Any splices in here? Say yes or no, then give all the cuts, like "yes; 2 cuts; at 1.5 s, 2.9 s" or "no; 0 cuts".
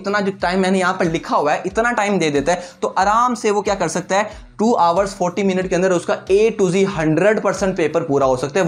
no; 0 cuts